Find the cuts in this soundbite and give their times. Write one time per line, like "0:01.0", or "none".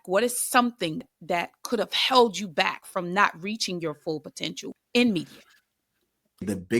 0:01.1